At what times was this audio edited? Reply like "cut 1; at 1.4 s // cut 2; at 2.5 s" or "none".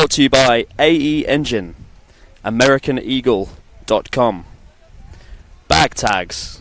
none